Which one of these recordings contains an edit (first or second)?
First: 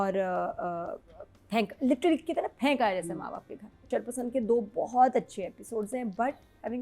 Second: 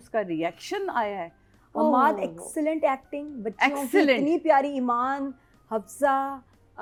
first